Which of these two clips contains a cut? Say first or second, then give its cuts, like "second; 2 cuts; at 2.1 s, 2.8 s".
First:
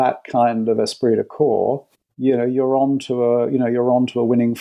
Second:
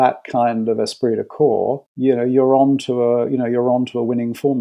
second; 1 cut; at 1.9 s